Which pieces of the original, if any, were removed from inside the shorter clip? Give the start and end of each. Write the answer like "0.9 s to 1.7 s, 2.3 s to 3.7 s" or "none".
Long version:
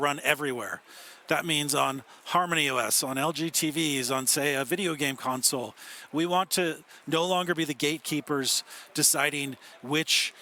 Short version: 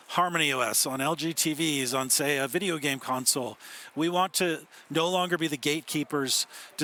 none